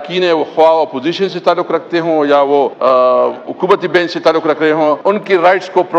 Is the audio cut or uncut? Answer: cut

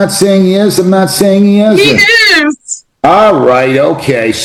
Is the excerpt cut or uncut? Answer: uncut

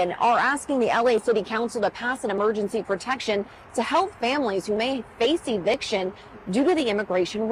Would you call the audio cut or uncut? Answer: uncut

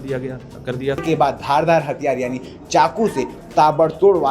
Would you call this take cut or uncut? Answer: cut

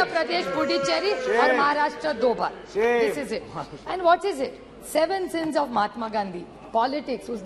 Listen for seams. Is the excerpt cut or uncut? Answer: uncut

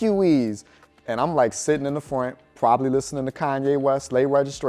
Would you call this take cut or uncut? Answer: uncut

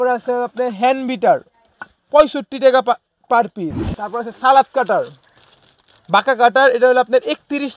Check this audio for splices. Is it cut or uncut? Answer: cut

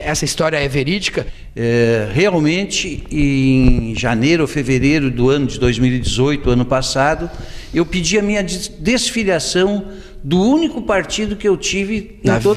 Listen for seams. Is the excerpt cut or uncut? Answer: cut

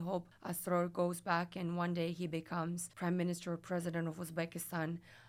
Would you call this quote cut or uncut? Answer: uncut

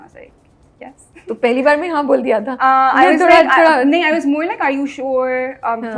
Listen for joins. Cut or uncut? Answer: uncut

